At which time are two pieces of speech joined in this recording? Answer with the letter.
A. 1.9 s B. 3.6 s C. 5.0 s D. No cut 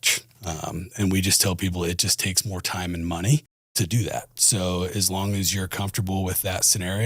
B